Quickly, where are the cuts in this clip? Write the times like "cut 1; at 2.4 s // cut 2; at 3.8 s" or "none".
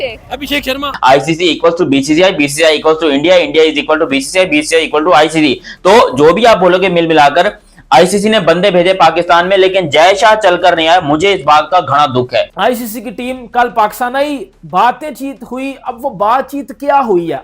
cut 1; at 0.9 s // cut 2; at 12.5 s